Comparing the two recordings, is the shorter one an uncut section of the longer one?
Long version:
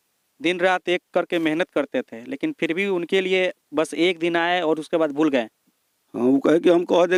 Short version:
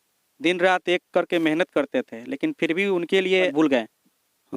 no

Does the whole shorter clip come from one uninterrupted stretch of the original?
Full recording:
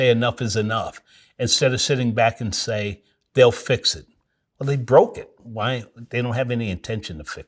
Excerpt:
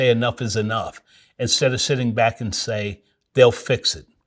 yes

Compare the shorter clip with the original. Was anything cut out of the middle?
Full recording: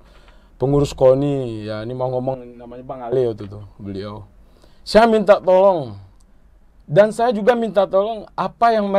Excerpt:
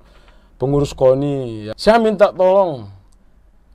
yes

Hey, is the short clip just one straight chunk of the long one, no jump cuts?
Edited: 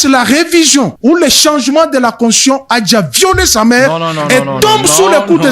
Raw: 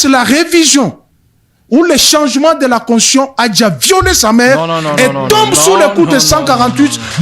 no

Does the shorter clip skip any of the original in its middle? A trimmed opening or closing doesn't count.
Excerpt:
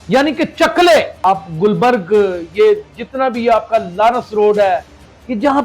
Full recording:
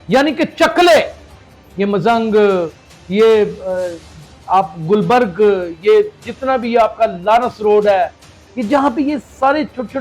yes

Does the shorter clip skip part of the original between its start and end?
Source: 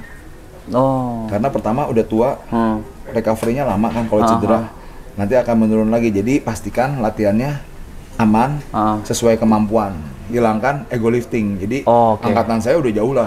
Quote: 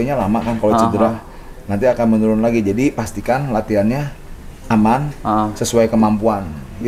no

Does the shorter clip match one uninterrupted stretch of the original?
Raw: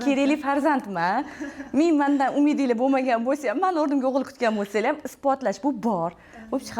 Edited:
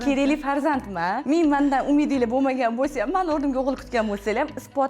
no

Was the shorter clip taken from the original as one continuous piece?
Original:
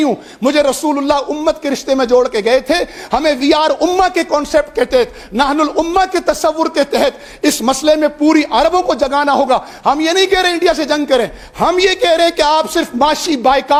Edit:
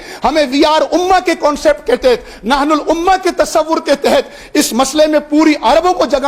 yes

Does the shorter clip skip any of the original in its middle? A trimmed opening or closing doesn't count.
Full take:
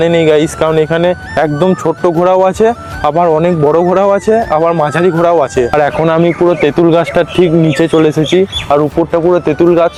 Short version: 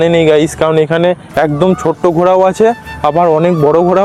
no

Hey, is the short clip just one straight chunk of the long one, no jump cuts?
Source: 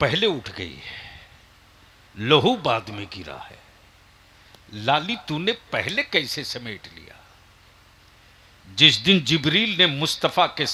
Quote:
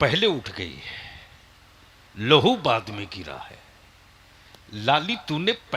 yes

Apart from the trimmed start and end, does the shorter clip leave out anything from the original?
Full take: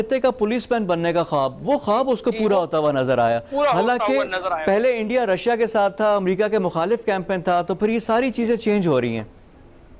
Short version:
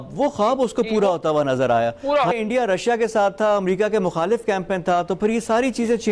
yes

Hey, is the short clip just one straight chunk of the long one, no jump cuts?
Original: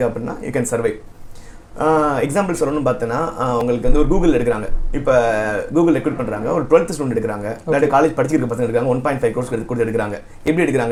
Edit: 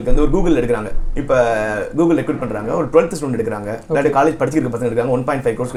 yes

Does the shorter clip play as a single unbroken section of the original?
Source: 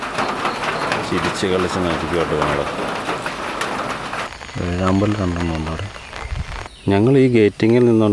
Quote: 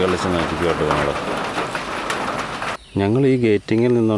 no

